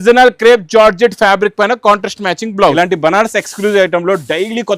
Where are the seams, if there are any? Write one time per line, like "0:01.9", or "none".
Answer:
0:02.7